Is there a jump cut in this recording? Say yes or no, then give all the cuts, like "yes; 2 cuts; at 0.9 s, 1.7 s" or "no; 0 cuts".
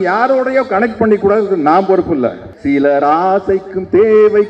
yes; 1 cut; at 2.5 s